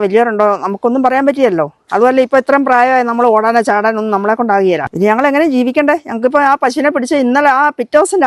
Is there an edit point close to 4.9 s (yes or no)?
yes